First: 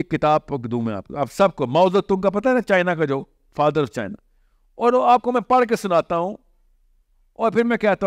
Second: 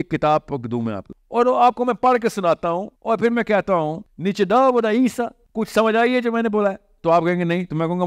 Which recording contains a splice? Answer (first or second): second